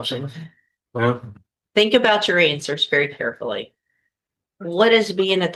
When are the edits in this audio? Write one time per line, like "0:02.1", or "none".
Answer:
none